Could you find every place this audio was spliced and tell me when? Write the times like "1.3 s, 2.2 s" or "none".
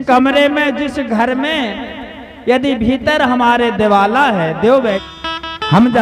5.0 s